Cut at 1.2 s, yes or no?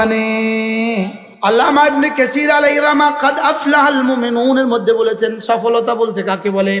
yes